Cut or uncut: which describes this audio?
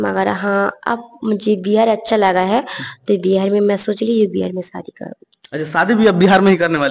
uncut